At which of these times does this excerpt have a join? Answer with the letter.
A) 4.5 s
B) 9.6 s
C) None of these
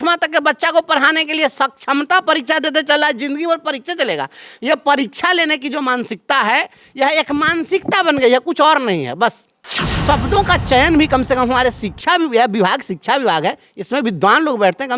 B